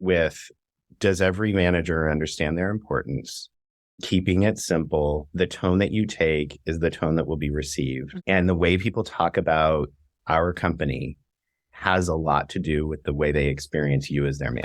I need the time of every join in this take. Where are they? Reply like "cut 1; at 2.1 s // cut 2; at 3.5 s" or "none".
cut 1; at 5.3 s // cut 2; at 8.1 s

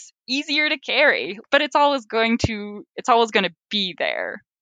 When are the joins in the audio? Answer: cut 1; at 1.4 s

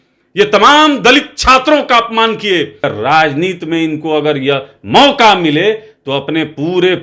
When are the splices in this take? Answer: cut 1; at 2.9 s

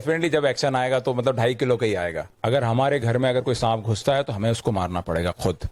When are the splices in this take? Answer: cut 1; at 2.3 s

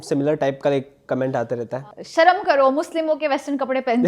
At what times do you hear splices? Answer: cut 1; at 1.8 s

